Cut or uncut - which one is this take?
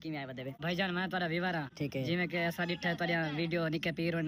uncut